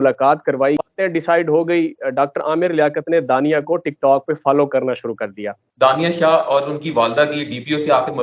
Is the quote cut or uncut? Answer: cut